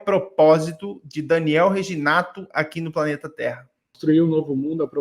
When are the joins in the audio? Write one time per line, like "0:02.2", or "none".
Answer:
0:04.0